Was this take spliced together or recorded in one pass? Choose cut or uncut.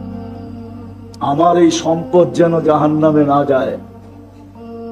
cut